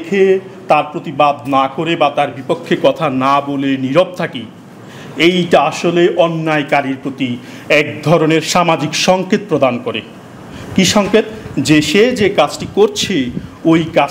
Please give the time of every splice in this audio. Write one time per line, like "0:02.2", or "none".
none